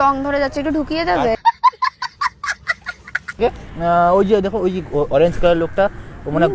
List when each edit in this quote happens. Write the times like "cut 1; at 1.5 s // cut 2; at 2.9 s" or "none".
cut 1; at 3.4 s